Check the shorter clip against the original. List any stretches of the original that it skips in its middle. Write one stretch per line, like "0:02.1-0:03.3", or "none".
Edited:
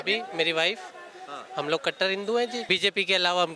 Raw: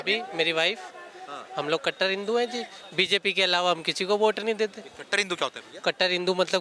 0:02.6-0:02.9

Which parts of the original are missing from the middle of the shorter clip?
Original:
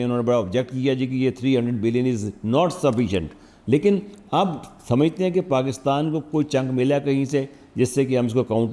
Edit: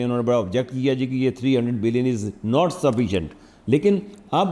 none

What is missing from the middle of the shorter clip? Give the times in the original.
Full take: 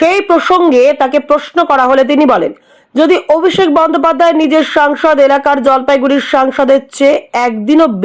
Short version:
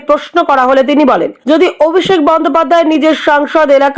0:02.5-0:02.8

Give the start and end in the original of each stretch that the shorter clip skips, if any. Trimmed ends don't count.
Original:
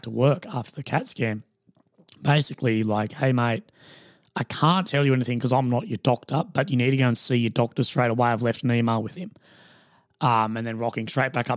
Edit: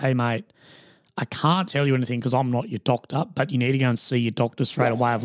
none

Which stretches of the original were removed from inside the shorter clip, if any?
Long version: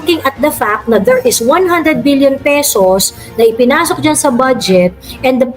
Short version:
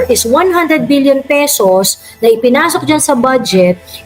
none

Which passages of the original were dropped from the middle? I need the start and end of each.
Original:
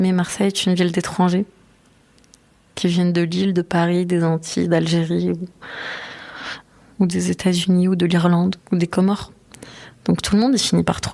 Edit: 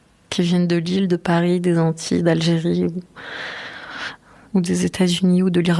none

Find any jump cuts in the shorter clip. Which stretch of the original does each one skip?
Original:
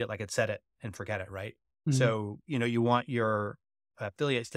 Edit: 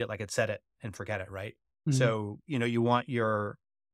none

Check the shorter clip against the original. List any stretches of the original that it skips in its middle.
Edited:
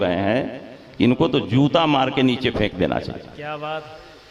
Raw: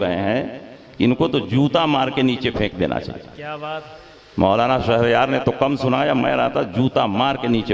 none

